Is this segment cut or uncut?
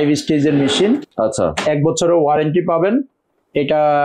uncut